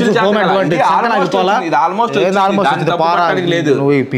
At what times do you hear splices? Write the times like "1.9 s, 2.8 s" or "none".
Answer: none